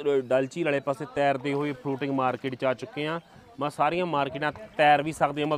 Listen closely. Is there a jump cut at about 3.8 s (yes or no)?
no